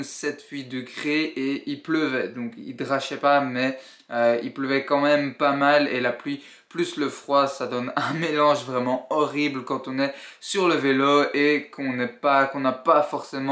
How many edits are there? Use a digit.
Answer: 0